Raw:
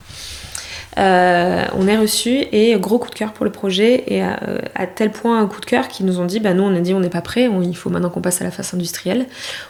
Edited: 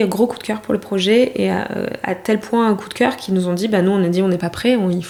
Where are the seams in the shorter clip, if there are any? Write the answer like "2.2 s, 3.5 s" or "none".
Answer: none